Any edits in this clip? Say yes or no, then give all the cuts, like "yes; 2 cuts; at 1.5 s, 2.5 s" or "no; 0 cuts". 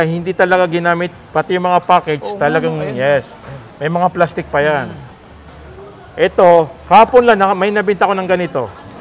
no; 0 cuts